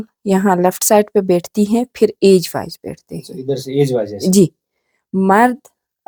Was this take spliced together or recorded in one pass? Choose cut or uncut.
uncut